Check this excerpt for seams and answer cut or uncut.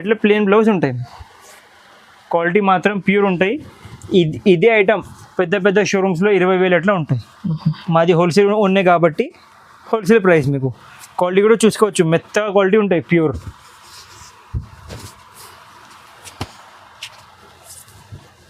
uncut